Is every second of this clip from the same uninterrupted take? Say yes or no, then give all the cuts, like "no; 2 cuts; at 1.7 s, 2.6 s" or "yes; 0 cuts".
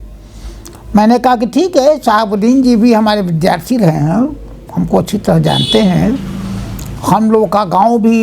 yes; 0 cuts